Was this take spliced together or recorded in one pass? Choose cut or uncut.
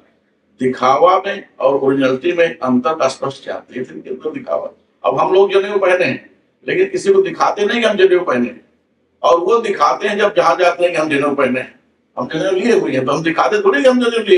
uncut